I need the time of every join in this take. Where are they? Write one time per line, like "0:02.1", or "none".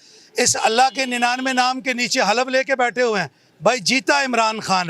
none